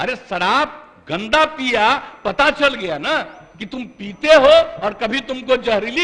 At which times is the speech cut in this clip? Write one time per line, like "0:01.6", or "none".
none